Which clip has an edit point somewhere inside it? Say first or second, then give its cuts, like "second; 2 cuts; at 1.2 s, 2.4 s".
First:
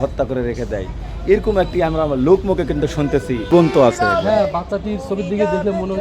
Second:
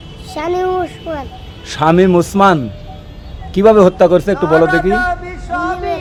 first; 1 cut; at 3.5 s